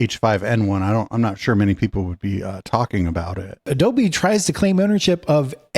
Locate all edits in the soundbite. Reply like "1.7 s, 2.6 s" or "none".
3.7 s